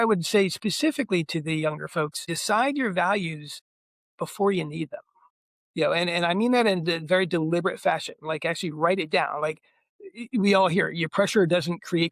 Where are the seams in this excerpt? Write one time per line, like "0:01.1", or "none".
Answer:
0:02.3